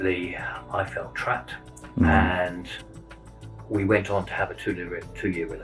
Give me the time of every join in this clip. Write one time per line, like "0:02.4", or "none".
none